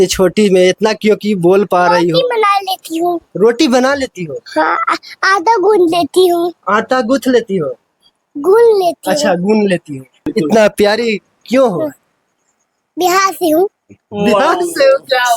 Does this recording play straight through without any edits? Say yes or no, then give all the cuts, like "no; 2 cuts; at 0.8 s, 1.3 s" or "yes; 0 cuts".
no; 1 cut; at 10.3 s